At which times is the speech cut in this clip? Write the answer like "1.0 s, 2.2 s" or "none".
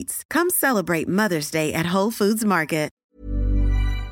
3.0 s